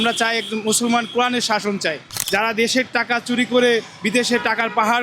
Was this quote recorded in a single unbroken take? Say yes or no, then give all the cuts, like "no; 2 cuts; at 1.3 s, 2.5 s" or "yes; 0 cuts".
no; 1 cut; at 2.1 s